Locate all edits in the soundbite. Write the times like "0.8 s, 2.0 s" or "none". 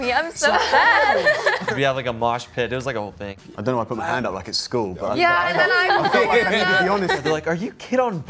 1.7 s, 3.2 s, 7.2 s